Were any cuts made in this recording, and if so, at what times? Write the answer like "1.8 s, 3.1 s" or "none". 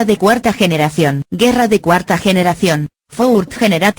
1.2 s